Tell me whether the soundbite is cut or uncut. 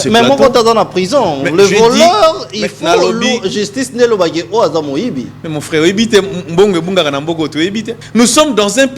cut